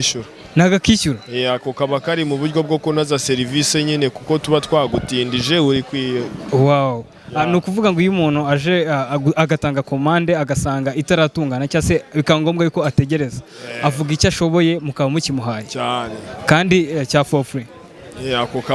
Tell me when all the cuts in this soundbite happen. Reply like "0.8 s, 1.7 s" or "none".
none

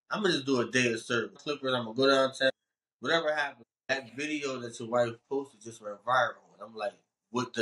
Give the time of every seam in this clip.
1.4 s, 2.5 s, 3.8 s

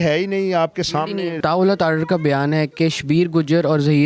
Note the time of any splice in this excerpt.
1.4 s

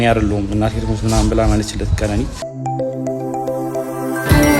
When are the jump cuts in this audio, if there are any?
2.4 s

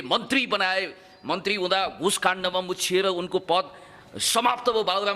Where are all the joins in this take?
none

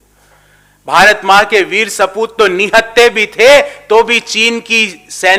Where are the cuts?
none

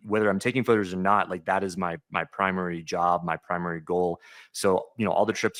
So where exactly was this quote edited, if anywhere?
none

